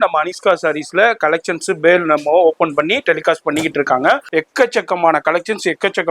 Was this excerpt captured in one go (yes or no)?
no